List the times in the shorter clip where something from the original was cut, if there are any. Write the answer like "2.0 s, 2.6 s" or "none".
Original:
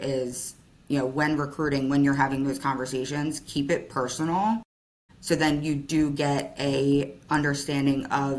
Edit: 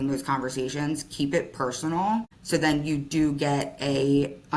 2.4 s